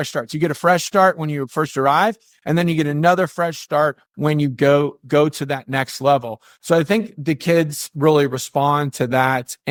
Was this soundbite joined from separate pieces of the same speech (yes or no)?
no